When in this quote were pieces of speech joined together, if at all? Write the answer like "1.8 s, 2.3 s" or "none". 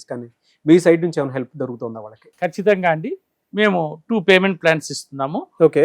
none